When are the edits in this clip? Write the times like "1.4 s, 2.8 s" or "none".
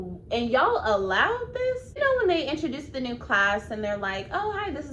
1.9 s